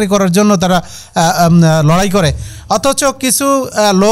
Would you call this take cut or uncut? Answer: uncut